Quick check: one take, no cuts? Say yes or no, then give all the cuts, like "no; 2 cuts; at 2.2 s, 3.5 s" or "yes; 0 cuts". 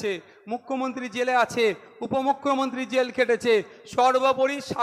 yes; 0 cuts